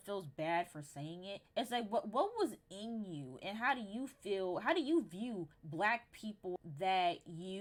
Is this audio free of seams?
yes; 0 cuts

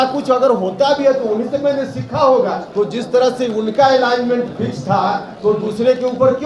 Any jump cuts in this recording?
yes; 2 cuts; at 2.6 s, 5.3 s

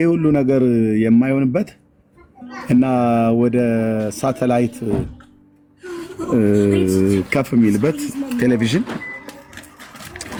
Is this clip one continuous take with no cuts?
yes; 0 cuts

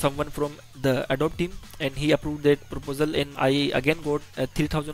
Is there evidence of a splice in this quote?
yes; 2 cuts; at 1.0 s, 3.3 s

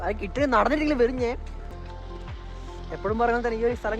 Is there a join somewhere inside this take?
yes; 1 cut; at 1.7 s

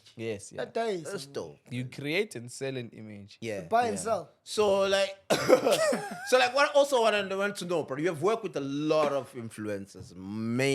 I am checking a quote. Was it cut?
no; 0 cuts

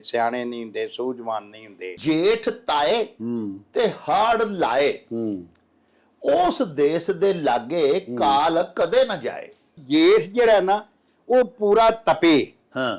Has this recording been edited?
yes; 2 cuts; at 2.0 s, 9.8 s

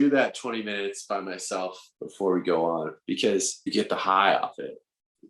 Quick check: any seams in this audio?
yes; 2 cuts; at 1.9 s, 3.7 s

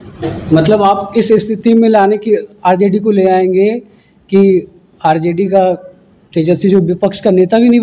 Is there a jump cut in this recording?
no; 0 cuts

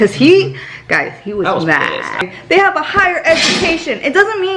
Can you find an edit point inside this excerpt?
yes; 1 cut; at 2.2 s

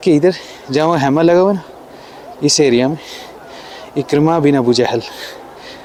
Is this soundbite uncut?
yes; 0 cuts

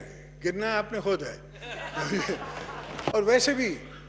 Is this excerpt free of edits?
no; 1 cut; at 3.1 s

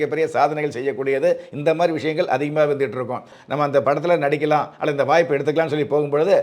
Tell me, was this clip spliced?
yes; 1 cut; at 3.4 s

